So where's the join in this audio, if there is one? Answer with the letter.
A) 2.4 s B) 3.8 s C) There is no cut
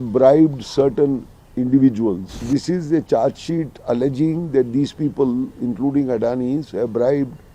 A